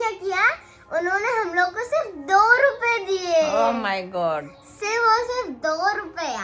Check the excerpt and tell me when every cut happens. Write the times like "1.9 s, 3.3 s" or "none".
none

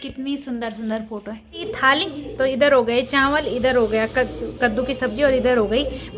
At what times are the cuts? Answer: 1.7 s

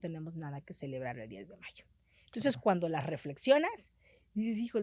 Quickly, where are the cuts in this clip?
none

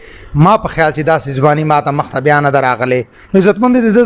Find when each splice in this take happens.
3.1 s

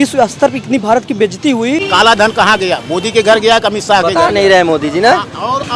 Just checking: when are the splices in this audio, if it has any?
1.8 s

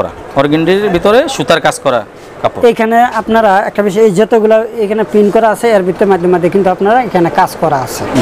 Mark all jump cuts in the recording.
none

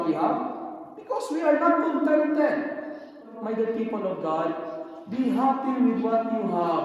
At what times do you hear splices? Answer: 3.3 s

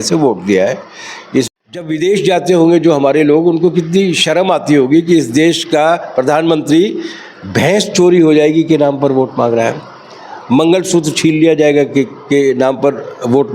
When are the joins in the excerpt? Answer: 1.5 s

